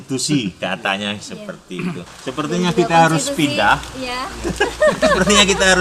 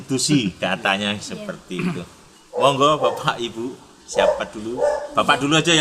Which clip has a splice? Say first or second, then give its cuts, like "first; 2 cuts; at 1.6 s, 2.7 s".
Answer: first; 1 cut; at 2.1 s